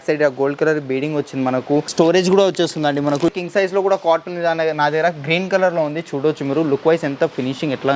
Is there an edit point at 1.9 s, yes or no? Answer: yes